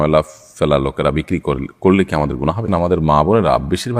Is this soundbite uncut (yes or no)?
no